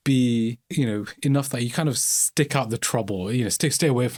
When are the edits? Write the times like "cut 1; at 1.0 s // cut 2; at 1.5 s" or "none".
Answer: none